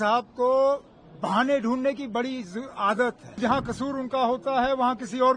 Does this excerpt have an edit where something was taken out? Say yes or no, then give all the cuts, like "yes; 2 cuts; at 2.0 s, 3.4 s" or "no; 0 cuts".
yes; 1 cut; at 3.4 s